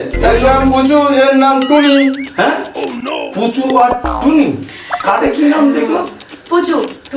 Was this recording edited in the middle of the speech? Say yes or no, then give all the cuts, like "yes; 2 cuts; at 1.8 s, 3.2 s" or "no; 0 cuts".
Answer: no; 0 cuts